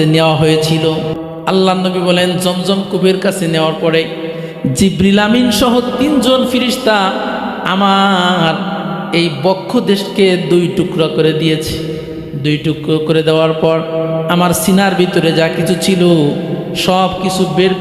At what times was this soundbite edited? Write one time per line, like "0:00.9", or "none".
0:01.1